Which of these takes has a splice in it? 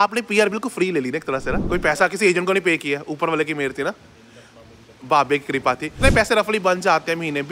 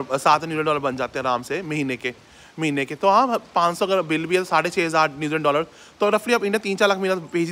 first; 1 cut; at 5.9 s

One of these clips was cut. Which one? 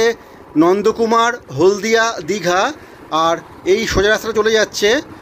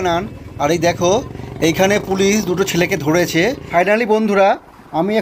second; 1 cut; at 3.6 s

